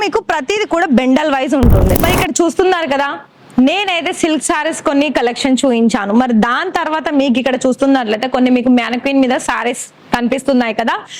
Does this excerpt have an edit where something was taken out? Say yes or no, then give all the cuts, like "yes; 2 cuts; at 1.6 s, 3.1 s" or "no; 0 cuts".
yes; 1 cut; at 1.9 s